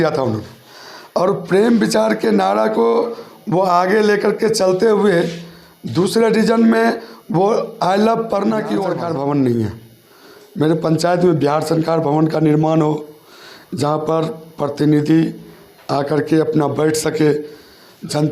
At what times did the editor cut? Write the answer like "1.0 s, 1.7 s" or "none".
8.9 s